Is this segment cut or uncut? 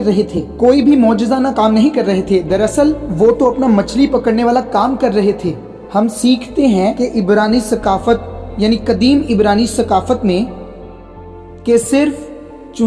uncut